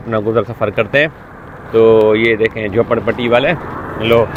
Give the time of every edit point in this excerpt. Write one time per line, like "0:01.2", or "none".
none